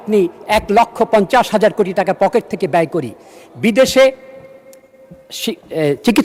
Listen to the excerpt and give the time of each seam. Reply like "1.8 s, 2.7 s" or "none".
none

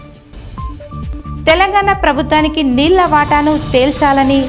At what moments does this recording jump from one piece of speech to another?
1.3 s

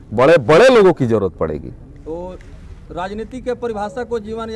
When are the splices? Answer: none

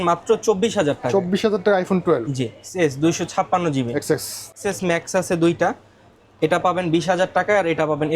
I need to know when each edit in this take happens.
2.5 s, 4.5 s

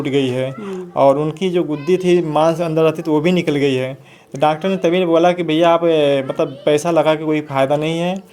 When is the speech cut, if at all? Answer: none

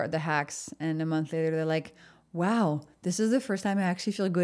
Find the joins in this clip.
none

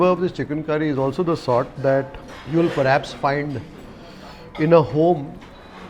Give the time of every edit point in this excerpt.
none

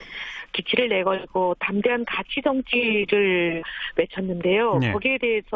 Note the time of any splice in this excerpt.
none

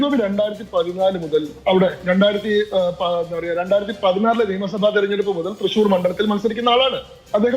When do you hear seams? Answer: none

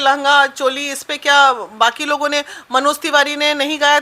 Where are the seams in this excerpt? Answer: none

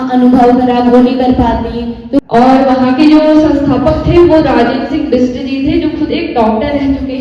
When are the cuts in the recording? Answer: 2.2 s

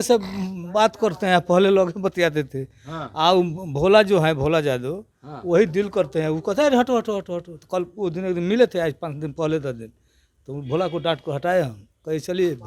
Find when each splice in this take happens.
none

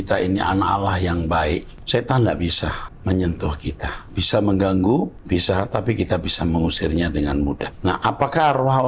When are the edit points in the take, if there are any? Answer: 1.7 s, 2.9 s, 5.2 s, 7.7 s

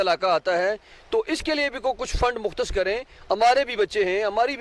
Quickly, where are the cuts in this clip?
none

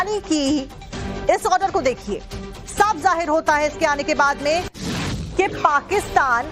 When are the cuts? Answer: 3.4 s

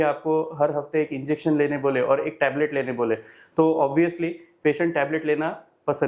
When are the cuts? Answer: none

